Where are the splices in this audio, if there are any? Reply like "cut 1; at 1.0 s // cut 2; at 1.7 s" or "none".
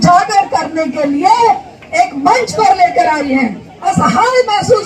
cut 1; at 3.7 s